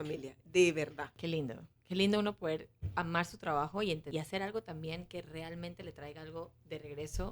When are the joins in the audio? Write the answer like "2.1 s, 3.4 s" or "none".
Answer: 1.1 s, 4.0 s